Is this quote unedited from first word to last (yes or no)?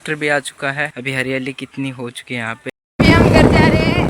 no